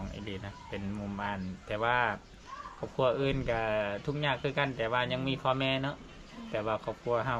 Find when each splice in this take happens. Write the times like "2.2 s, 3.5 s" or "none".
none